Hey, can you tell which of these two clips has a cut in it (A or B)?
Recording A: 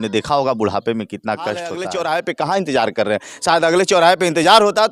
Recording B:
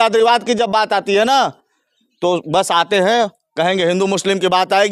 A